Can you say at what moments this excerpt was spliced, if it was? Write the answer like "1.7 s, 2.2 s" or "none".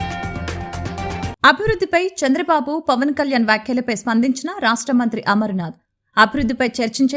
1.3 s